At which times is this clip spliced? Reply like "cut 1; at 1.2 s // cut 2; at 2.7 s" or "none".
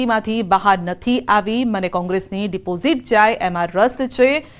none